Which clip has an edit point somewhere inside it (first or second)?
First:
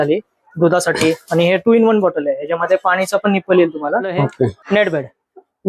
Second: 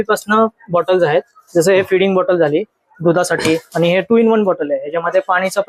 first